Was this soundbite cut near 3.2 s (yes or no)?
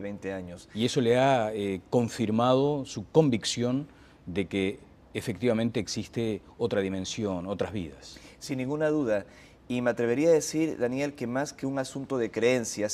yes